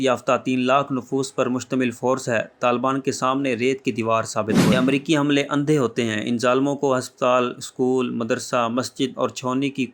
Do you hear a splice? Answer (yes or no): yes